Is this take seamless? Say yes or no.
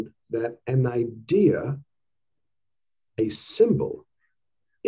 yes